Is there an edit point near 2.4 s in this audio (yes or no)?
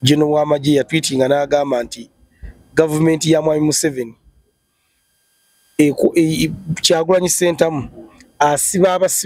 no